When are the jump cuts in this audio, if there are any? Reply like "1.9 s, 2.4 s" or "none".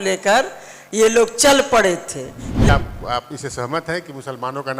2.7 s